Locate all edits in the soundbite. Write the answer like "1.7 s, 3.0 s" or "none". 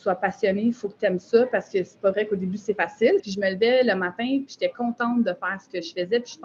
3.3 s